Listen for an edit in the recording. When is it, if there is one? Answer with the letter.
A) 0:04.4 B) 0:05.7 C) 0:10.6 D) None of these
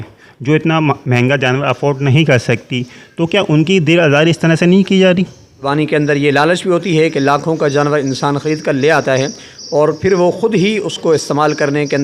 B